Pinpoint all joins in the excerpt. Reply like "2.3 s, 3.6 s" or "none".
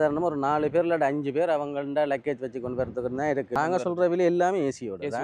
3.6 s